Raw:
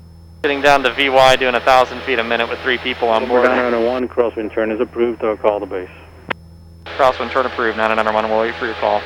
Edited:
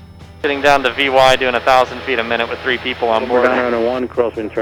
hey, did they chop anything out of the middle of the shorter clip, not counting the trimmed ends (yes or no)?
no